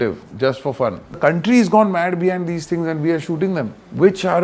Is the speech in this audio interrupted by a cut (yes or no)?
yes